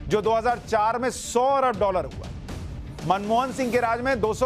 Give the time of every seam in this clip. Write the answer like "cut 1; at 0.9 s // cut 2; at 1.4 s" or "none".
none